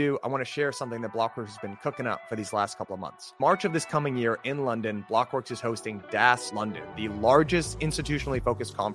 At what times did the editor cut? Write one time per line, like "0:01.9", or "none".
0:06.5